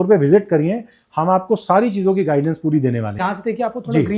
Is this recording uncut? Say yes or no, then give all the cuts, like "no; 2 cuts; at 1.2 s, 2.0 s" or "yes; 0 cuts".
no; 1 cut; at 3.2 s